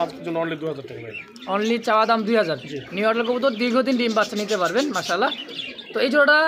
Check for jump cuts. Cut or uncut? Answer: uncut